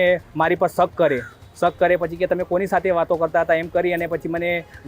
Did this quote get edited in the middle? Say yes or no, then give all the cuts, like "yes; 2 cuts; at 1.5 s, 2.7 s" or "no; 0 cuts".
no; 0 cuts